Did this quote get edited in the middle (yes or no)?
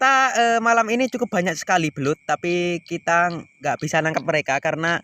no